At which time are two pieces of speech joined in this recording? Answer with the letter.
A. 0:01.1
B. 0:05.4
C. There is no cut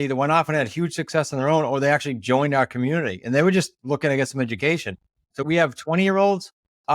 B